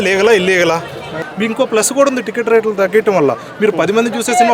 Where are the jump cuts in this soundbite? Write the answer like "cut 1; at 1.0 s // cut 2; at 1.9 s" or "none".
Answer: cut 1; at 1.2 s